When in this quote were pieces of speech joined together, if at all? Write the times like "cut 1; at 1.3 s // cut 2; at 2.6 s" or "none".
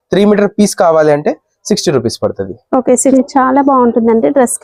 cut 1; at 3.1 s